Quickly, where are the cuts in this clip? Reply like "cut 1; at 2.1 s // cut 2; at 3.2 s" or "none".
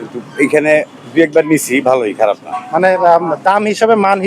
cut 1; at 2.5 s